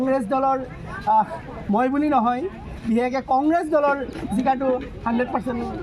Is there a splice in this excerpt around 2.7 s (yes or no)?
no